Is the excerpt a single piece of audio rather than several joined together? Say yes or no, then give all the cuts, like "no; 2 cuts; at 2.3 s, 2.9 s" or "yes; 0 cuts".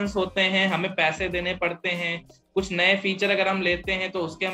yes; 0 cuts